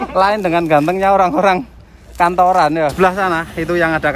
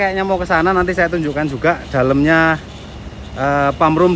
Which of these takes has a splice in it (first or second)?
first